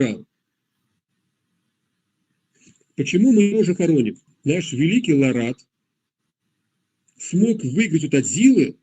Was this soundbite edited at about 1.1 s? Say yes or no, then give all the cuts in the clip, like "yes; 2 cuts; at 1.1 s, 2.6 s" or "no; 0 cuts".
no; 1 cut; at 4.3 s